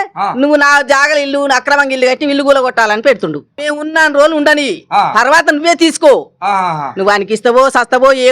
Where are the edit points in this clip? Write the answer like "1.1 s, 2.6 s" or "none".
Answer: 3.6 s